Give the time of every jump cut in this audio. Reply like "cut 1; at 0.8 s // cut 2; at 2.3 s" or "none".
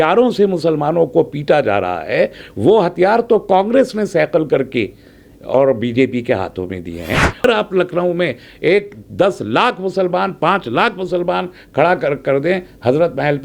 cut 1; at 7.4 s